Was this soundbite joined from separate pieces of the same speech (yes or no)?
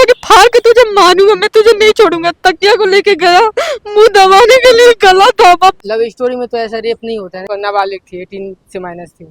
yes